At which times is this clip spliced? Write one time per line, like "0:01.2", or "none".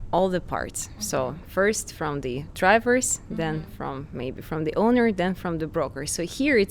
none